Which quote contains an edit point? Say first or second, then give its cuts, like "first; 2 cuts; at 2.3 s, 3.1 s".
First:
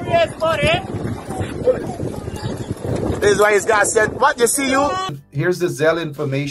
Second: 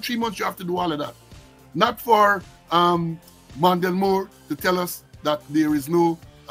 first; 1 cut; at 5.1 s